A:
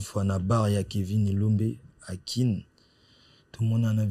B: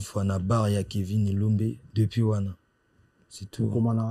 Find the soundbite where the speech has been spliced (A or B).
B